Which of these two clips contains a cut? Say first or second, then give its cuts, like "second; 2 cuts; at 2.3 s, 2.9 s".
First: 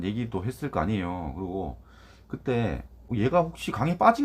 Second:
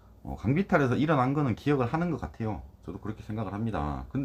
first; 1 cut; at 2.9 s